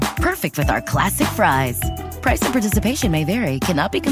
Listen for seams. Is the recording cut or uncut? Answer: uncut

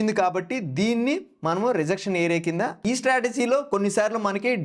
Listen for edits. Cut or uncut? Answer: cut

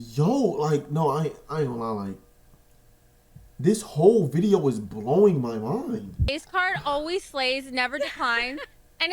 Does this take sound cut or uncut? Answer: cut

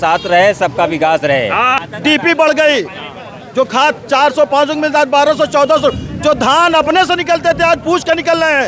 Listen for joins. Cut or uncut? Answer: cut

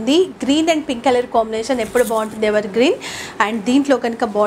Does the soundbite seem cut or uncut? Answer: uncut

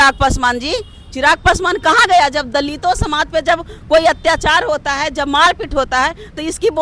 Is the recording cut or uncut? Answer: uncut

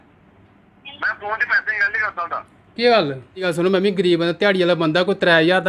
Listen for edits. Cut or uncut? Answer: cut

